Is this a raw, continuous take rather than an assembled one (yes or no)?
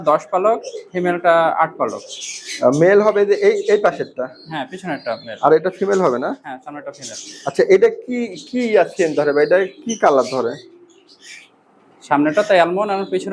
yes